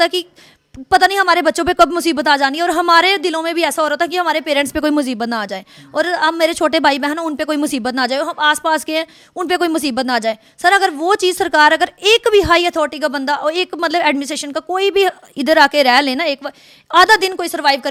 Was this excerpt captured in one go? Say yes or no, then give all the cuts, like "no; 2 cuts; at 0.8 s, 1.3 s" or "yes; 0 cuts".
yes; 0 cuts